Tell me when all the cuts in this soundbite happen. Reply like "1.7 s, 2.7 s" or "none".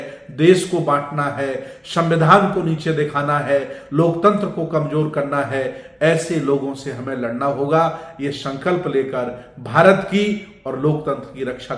none